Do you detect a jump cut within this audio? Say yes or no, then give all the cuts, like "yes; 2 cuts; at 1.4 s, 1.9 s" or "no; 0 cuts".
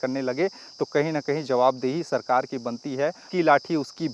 yes; 1 cut; at 3.2 s